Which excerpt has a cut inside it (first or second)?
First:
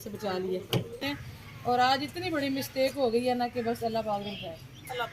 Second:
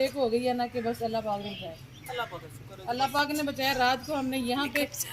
first